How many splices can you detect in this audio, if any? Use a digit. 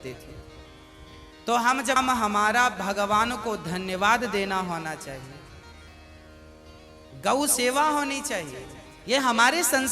1